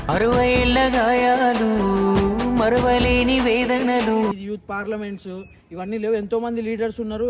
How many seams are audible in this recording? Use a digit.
1